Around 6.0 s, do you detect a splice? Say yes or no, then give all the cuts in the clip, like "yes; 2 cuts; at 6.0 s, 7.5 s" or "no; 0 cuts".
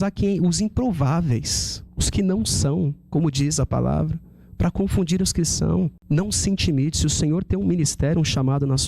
yes; 1 cut; at 6.0 s